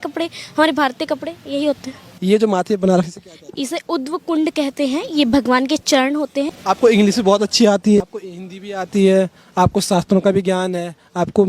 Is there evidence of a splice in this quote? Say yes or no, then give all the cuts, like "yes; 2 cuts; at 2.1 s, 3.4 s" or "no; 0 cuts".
yes; 3 cuts; at 2.1 s, 6.5 s, 8.0 s